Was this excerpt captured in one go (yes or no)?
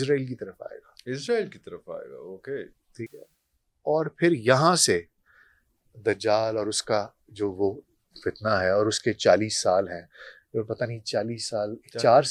yes